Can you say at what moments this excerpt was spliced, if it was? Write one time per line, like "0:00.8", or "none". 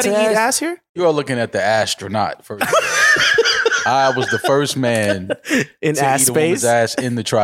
0:01.0